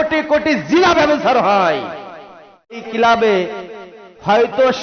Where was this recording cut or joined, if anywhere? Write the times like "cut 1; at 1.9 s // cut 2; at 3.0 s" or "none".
cut 1; at 2.8 s